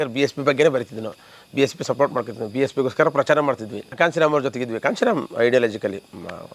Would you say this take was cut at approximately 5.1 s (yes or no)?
no